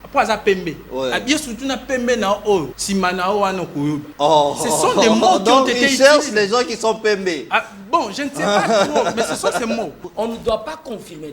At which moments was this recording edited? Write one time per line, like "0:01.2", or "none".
0:02.8
0:04.1
0:10.0